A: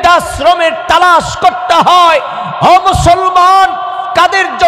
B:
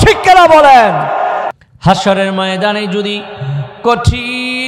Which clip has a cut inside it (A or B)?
B